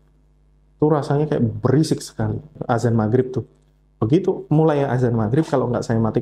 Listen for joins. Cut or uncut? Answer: cut